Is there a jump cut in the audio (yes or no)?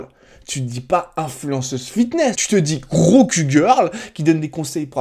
yes